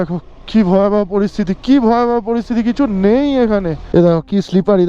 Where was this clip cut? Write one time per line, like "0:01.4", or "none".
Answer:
0:03.8